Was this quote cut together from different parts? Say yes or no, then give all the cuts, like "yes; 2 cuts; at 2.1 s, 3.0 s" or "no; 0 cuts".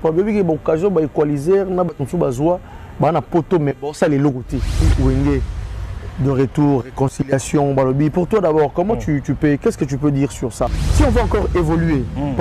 yes; 2 cuts; at 4.9 s, 10.8 s